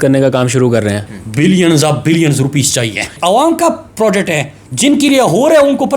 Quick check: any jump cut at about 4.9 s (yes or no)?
no